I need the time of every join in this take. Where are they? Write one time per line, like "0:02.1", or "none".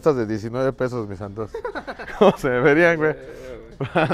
none